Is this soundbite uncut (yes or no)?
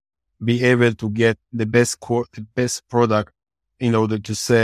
yes